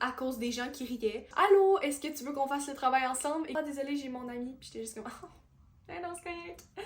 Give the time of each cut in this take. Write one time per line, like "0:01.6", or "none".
0:01.3
0:03.6